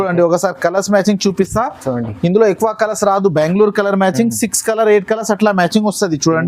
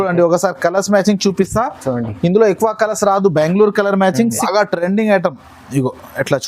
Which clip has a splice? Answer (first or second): second